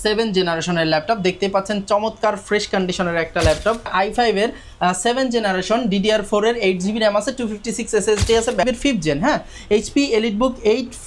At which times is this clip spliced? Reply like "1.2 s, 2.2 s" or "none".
3.9 s, 8.7 s

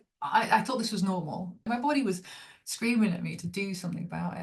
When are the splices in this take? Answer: 1.6 s

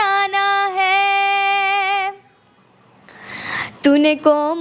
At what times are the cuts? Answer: none

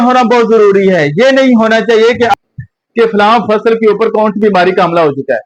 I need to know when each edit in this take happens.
none

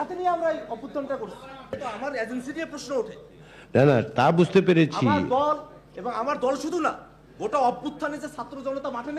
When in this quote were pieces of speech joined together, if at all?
1.8 s

